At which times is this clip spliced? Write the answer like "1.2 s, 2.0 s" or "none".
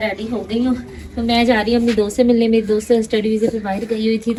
none